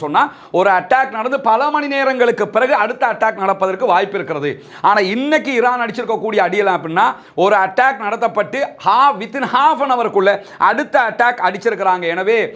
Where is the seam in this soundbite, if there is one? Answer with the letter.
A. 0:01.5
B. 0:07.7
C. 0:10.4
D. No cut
D